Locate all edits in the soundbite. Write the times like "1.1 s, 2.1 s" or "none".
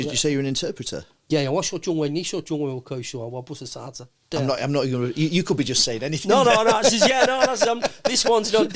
none